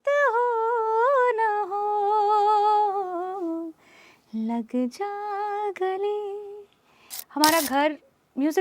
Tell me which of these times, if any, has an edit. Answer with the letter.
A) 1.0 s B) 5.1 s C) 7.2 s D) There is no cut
C